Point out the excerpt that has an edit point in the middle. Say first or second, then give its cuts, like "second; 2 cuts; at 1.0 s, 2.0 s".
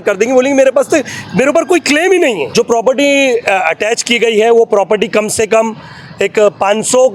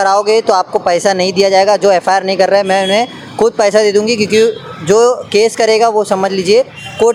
first; 1 cut; at 2.4 s